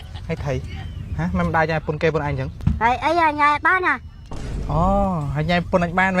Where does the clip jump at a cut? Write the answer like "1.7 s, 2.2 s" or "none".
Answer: 2.5 s